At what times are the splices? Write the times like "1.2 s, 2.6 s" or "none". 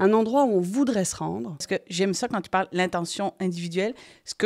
1.6 s